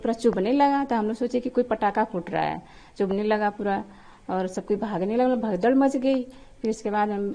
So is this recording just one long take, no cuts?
yes; 0 cuts

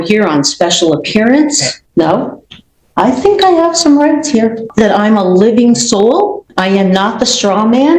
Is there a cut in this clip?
yes; 3 cuts; at 1.7 s, 4.6 s, 6.5 s

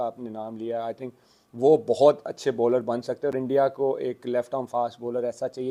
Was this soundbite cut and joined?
no; 0 cuts

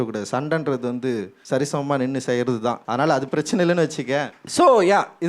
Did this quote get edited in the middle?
yes; 3 cuts; at 1.3 s, 2.8 s, 4.4 s

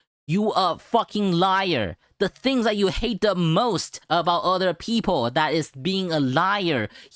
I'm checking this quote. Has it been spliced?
no; 0 cuts

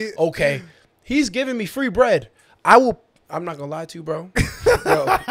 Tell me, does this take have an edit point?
no; 0 cuts

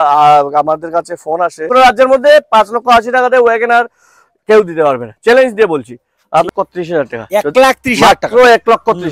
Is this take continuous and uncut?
no; 2 cuts; at 1.6 s, 6.5 s

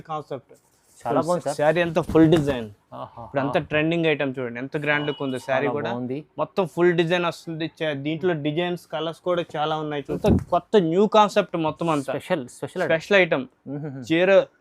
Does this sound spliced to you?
yes; 1 cut; at 10.1 s

